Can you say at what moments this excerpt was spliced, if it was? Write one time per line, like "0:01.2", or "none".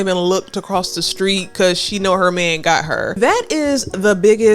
0:03.1

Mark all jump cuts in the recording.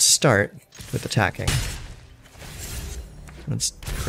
none

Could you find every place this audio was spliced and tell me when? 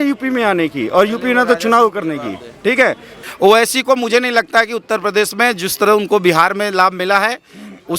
0:03.1

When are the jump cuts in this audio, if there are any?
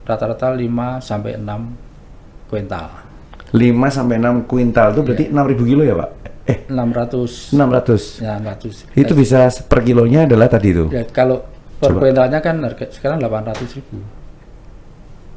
none

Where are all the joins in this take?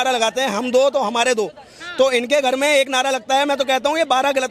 none

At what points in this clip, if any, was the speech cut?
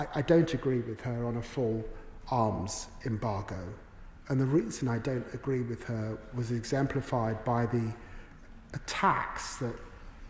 none

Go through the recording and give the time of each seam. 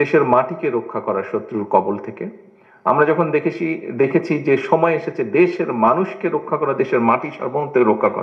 none

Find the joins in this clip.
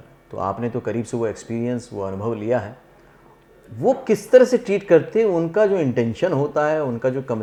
none

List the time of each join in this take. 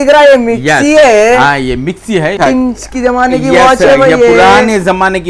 0:02.4

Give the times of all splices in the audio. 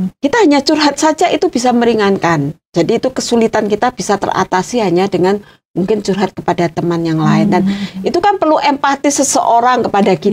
none

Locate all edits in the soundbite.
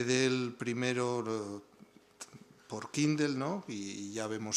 0:01.5

